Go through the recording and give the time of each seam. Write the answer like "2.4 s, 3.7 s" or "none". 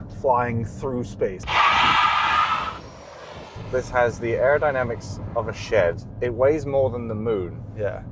1.4 s, 3.6 s